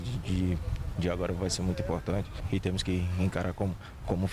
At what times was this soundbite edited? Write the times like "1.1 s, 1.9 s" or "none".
2.4 s